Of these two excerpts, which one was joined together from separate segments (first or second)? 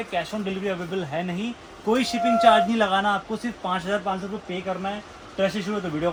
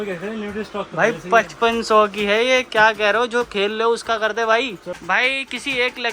second